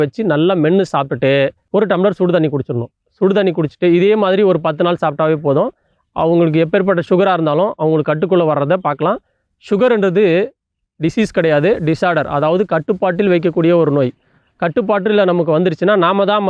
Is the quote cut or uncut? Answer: cut